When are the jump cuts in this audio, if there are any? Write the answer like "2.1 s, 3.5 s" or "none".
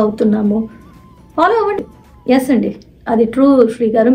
1.8 s